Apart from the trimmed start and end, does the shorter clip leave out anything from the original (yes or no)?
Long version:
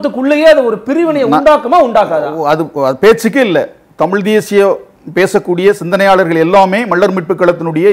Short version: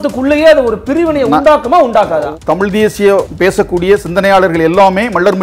yes